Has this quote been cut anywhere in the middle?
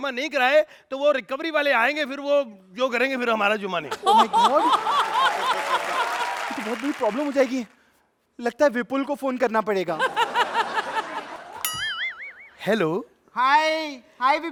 no; 0 cuts

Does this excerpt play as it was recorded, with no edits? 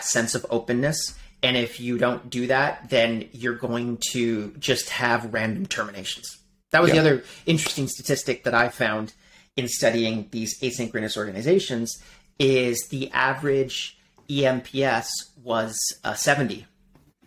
yes; 0 cuts

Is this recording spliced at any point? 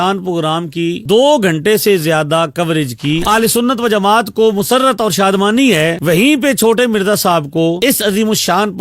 yes; 1 cut; at 3.2 s

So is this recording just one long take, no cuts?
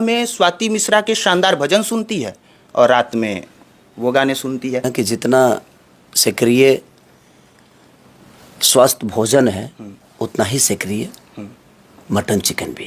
no; 1 cut; at 4.9 s

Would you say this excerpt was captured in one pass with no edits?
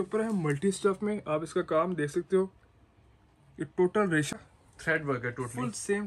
no; 1 cut; at 4.3 s

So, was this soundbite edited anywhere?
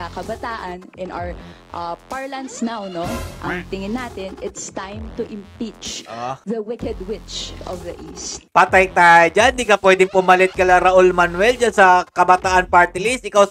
yes; 2 cuts; at 6.4 s, 8.3 s

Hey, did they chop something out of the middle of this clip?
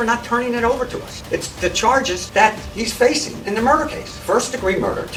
no; 0 cuts

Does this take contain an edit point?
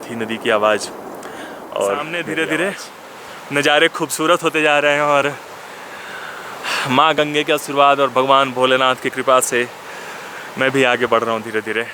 yes; 1 cut; at 2.1 s

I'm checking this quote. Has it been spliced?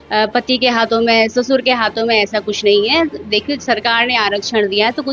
no; 0 cuts

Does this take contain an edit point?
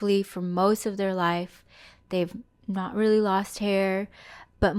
no; 0 cuts

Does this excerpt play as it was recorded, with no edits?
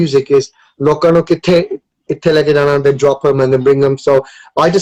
yes; 0 cuts

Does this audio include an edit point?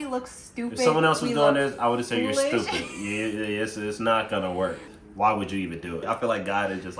yes; 2 cuts; at 4.9 s, 6.0 s

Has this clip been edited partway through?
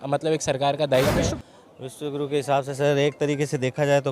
yes; 1 cut; at 1.3 s

